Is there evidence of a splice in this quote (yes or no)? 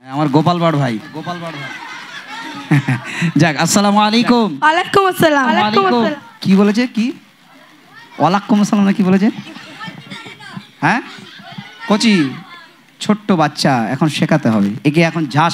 no